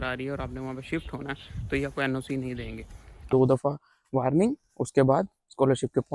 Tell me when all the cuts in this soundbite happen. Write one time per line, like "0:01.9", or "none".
0:03.3